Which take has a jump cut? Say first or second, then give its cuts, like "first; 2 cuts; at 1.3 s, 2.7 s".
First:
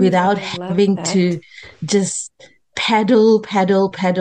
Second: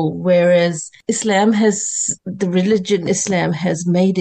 second; 2 cuts; at 0.9 s, 2.1 s